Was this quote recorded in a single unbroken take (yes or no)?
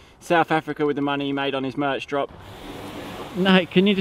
no